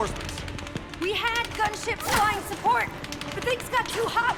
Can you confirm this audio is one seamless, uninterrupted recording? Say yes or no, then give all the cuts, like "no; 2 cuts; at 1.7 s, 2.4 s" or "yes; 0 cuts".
yes; 0 cuts